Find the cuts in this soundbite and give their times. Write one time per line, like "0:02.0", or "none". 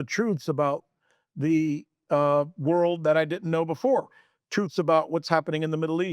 none